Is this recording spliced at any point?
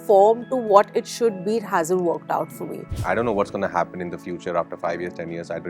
yes; 1 cut; at 3.0 s

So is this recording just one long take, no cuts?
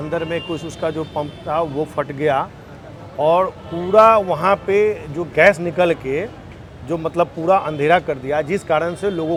yes; 0 cuts

